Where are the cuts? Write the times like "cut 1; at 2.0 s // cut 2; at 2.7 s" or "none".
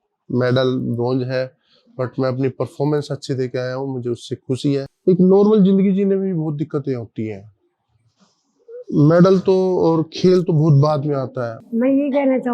cut 1; at 4.9 s // cut 2; at 11.5 s